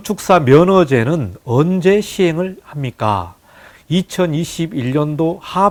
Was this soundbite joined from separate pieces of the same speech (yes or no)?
no